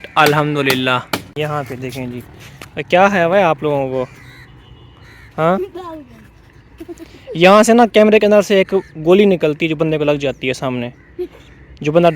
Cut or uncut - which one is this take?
cut